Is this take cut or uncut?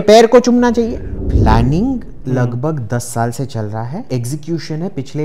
cut